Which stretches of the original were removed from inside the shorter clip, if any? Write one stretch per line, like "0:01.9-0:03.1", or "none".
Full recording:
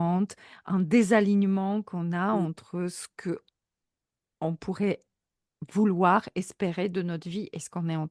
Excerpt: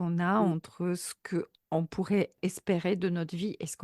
0:03.5-0:04.3
0:05.2-0:06.4